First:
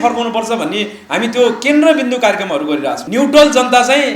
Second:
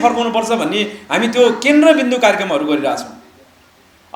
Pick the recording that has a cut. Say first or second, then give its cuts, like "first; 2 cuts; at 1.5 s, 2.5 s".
first; 1 cut; at 3.0 s